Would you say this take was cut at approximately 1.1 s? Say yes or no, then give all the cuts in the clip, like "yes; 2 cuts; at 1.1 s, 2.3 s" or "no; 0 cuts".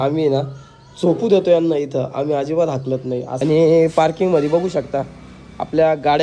no; 1 cut; at 3.3 s